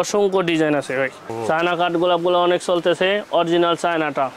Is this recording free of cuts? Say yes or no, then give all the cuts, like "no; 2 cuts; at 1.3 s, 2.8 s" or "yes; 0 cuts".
no; 1 cut; at 1.4 s